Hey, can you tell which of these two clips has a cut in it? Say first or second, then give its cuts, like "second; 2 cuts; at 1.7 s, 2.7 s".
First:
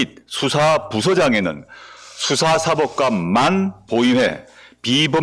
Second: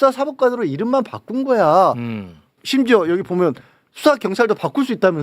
second; 1 cut; at 2.6 s